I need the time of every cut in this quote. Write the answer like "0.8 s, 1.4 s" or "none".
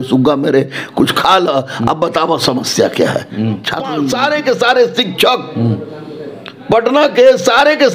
4.0 s